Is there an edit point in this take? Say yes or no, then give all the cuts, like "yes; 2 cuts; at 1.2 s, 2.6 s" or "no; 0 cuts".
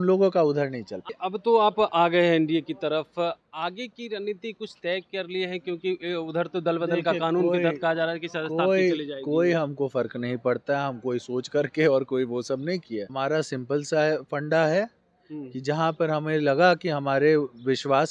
yes; 2 cuts; at 1.0 s, 13.1 s